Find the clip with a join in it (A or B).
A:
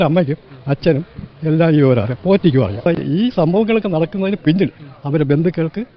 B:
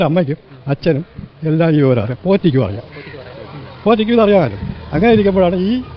A